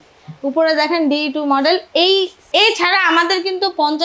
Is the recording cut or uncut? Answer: cut